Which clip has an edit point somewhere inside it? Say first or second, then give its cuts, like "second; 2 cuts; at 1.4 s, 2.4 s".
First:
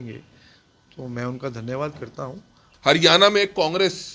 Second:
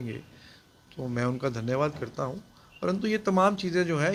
first; 1 cut; at 2.7 s